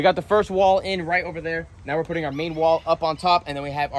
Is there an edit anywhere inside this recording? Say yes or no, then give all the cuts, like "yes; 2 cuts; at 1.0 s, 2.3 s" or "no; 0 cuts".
no; 0 cuts